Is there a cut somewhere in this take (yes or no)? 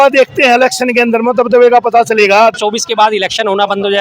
yes